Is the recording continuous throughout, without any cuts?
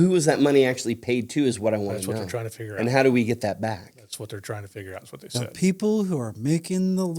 yes; 0 cuts

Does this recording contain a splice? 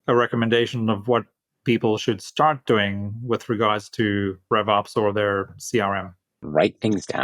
yes; 2 cuts; at 4.4 s, 6.4 s

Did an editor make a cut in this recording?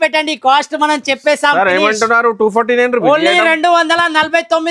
no; 0 cuts

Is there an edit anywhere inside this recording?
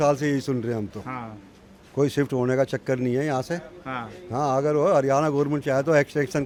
no; 0 cuts

